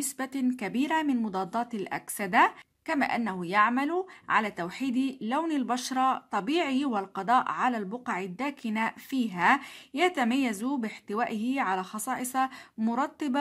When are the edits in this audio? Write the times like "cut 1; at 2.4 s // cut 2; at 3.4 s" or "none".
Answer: cut 1; at 2.7 s